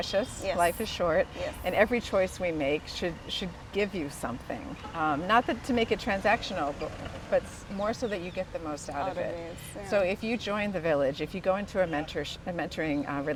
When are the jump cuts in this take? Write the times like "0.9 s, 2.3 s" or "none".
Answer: none